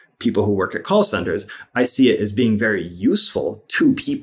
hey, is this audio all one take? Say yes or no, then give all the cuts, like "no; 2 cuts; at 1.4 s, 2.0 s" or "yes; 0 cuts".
yes; 0 cuts